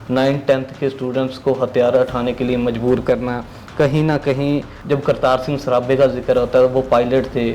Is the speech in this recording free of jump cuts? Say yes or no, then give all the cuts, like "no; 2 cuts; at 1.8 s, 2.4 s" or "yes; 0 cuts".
no; 1 cut; at 4.7 s